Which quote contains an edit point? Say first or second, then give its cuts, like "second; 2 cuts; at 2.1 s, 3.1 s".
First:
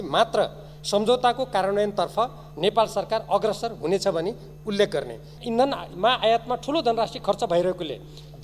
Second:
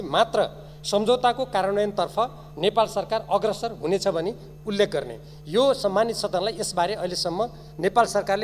first; 1 cut; at 5.3 s